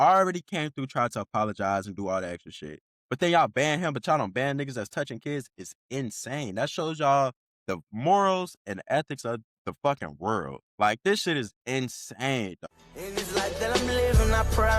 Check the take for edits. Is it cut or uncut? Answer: cut